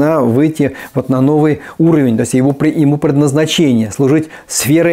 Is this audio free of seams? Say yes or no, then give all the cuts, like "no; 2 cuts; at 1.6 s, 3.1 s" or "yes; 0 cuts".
yes; 0 cuts